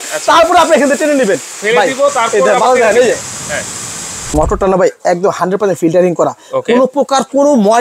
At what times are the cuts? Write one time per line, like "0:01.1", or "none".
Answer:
0:01.5
0:04.3